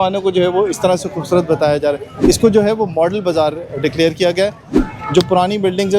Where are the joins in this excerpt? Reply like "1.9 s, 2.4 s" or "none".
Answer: 2.1 s, 4.6 s